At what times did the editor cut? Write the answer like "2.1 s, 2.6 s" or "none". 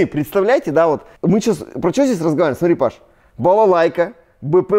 1.1 s